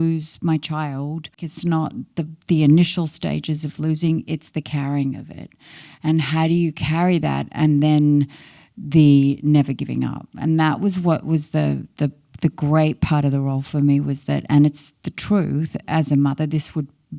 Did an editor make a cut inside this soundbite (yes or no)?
yes